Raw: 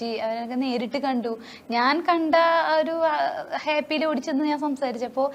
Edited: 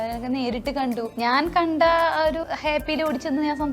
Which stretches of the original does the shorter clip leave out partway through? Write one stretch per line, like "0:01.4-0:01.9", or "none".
0:01.4-0:01.6
0:02.9-0:03.4